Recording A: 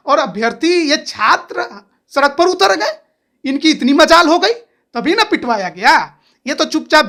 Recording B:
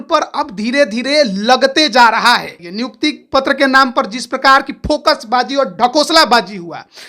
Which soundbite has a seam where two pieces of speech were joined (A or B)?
B